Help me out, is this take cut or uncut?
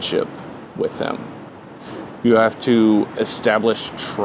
uncut